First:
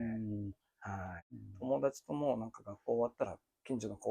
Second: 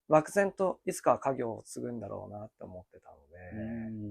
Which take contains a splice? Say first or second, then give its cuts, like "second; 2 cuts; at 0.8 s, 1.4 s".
first; 1 cut; at 1.3 s